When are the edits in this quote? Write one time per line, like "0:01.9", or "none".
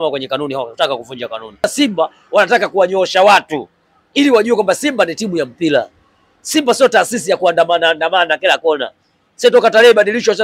0:01.6